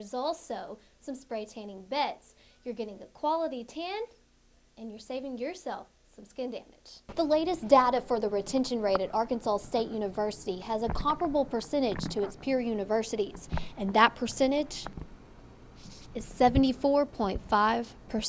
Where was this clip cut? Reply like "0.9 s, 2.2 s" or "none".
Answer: 7.0 s

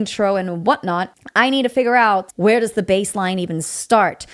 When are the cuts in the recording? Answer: 1.2 s, 2.3 s

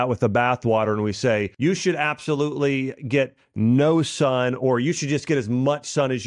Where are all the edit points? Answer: 1.5 s

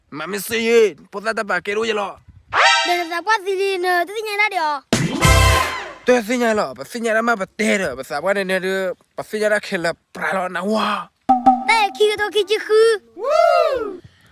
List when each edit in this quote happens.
none

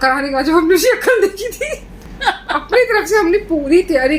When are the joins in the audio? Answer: 2.0 s

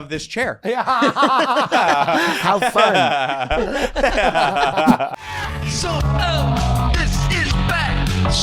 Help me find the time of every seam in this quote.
5.1 s

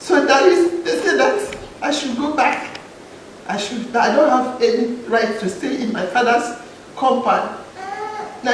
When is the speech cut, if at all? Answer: 1.6 s

